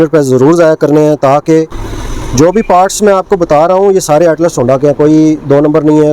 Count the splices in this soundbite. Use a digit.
1